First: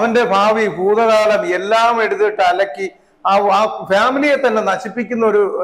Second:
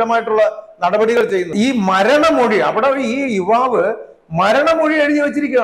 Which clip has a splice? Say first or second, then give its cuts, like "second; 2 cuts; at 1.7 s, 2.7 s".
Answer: second; 1 cut; at 1.5 s